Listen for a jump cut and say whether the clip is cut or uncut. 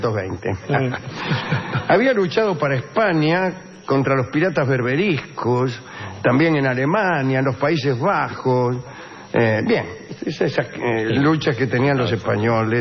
cut